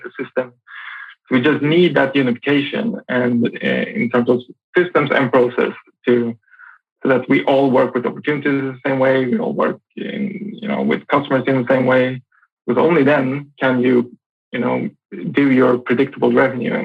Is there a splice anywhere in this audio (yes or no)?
no